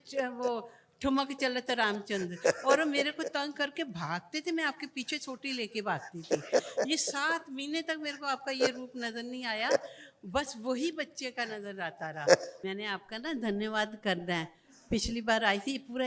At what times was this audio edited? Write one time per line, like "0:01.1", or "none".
0:12.5